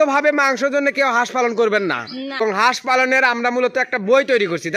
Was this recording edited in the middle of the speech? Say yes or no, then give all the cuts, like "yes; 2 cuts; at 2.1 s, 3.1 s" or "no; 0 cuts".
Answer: yes; 1 cut; at 2.4 s